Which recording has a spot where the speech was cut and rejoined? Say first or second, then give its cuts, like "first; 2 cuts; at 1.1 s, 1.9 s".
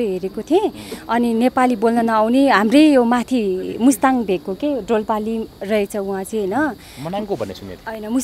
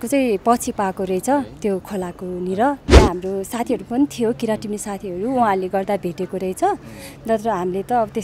second; 1 cut; at 2.9 s